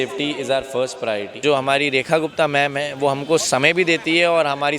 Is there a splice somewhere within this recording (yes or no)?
yes